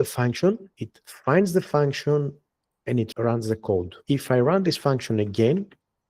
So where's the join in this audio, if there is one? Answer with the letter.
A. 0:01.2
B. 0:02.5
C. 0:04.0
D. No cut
C